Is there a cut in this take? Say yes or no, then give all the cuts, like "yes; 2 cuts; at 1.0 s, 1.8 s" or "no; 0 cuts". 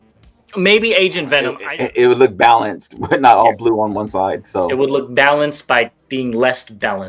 yes; 1 cut; at 1.6 s